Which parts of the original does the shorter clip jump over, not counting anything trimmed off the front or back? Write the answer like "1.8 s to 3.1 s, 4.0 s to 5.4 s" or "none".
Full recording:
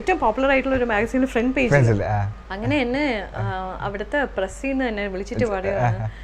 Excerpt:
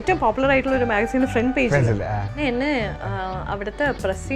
2.3 s to 2.7 s